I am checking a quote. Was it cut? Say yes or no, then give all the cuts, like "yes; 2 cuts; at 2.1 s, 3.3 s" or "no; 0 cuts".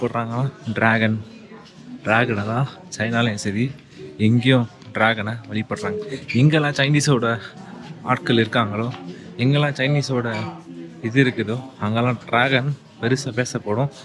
no; 0 cuts